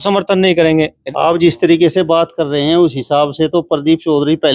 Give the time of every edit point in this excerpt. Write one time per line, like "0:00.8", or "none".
0:01.0